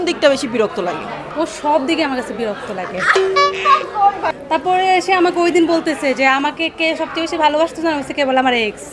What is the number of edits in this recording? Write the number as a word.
two